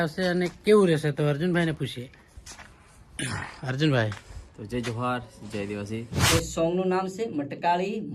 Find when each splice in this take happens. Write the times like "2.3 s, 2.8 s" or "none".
6.3 s